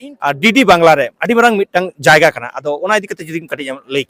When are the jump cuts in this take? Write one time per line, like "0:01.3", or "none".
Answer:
none